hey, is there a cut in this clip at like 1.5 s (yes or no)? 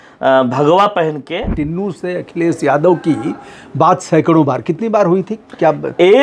yes